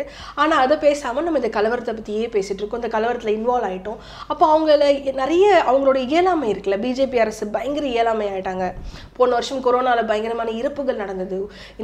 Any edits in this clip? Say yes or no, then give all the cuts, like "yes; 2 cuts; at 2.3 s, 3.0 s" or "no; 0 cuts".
no; 0 cuts